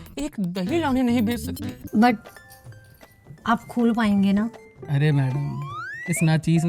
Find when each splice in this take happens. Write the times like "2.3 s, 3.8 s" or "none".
1.7 s